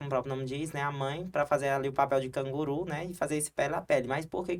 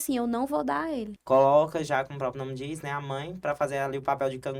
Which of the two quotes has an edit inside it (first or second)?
second